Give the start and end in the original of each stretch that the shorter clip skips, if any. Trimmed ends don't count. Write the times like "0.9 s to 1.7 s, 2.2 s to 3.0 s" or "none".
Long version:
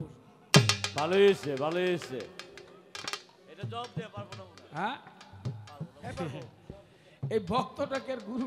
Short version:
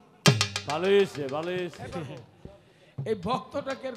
2.0 s to 6.0 s